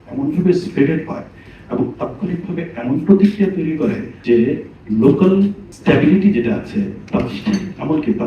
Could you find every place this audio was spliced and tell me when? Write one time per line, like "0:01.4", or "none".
0:04.1
0:04.7
0:05.7